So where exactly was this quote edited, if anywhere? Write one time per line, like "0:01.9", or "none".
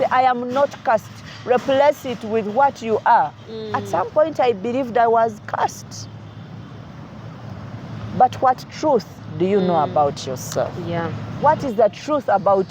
0:03.8
0:11.2